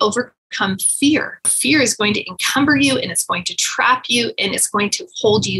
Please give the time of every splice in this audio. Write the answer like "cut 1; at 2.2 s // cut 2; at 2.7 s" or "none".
cut 1; at 1.5 s